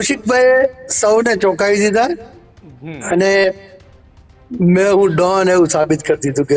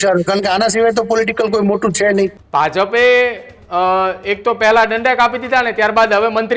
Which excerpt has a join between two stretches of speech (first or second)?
second